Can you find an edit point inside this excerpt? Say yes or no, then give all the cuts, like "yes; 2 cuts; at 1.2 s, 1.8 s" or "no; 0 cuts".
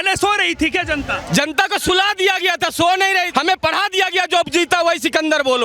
yes; 1 cut; at 3.3 s